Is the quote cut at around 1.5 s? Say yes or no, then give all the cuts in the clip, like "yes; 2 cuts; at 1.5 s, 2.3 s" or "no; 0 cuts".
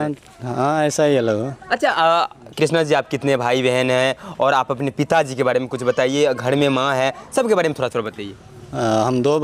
no; 0 cuts